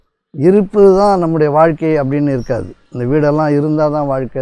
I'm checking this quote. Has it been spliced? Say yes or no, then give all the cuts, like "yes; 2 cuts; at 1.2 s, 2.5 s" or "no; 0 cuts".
no; 0 cuts